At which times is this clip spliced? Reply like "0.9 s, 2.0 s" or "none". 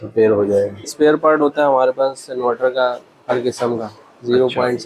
0.9 s